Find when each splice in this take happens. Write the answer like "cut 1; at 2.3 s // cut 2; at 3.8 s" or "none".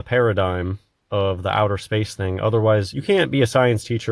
cut 1; at 2.9 s